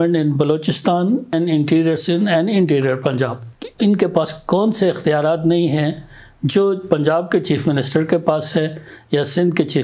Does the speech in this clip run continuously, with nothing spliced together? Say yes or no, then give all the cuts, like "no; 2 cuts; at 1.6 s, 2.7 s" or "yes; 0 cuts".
no; 2 cuts; at 1.3 s, 3.4 s